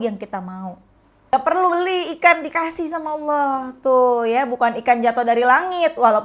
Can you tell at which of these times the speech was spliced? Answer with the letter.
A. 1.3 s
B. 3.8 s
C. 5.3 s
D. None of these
A